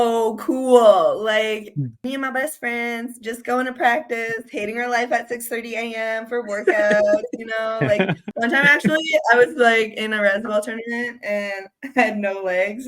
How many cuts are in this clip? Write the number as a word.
two